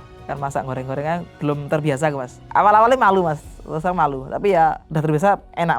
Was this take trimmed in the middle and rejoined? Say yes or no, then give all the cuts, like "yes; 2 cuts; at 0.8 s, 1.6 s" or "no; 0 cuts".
yes; 2 cuts; at 2.4 s, 4.8 s